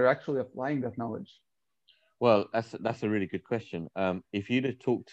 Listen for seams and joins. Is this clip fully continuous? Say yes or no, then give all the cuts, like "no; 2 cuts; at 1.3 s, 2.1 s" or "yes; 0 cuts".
yes; 0 cuts